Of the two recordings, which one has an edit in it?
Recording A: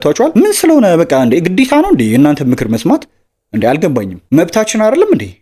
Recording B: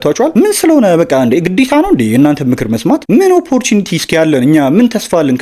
B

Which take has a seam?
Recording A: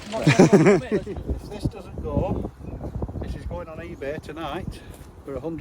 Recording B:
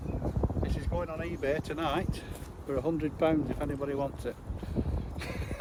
A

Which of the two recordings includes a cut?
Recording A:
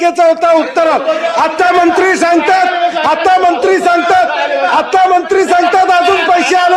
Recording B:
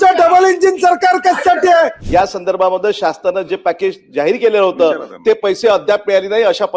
B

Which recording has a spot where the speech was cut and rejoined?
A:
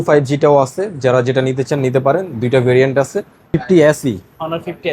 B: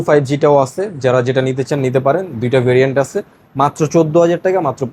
A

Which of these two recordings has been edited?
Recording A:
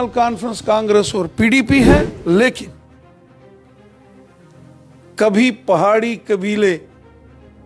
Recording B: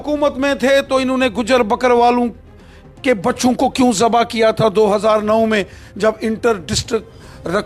A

